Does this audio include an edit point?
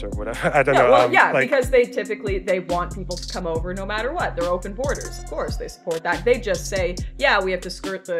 no; 0 cuts

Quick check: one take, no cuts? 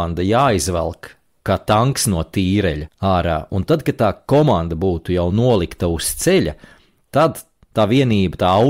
no; 2 cuts; at 1.3 s, 2.9 s

